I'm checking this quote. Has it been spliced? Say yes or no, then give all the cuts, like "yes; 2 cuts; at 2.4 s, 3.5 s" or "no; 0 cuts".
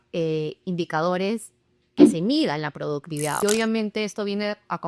yes; 1 cut; at 3.4 s